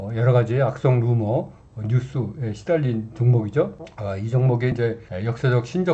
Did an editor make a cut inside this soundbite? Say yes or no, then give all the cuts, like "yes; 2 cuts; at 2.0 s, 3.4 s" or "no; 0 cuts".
no; 0 cuts